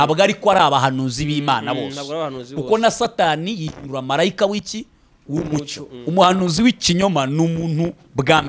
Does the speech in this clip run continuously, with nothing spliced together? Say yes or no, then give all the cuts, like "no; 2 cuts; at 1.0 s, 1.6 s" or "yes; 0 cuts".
no; 1 cut; at 5.9 s